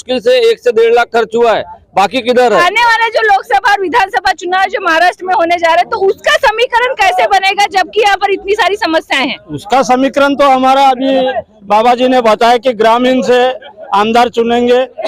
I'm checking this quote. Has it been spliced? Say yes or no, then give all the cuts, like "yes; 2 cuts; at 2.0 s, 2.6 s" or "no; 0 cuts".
yes; 1 cut; at 2.5 s